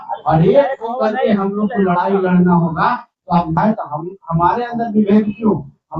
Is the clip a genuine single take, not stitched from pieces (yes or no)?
no